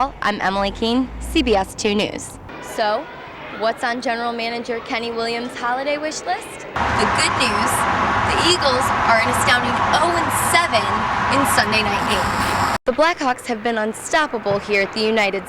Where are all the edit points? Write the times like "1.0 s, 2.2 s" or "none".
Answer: 2.3 s, 6.8 s, 12.8 s